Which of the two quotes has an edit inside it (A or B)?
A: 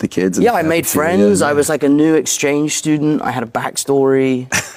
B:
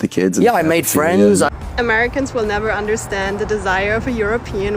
B